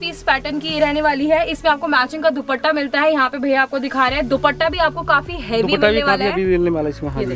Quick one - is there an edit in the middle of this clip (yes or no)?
no